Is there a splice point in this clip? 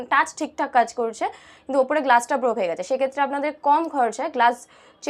no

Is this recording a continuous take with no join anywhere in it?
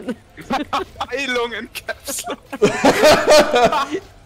yes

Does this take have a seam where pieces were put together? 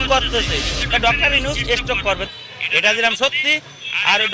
yes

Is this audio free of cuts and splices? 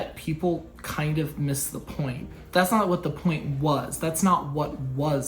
no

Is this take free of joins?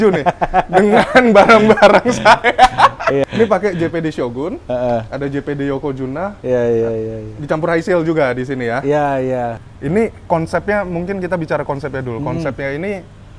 no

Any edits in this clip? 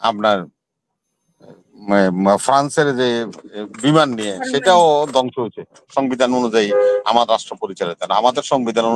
yes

